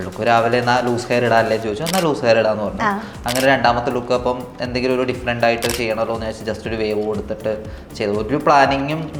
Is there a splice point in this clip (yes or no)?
no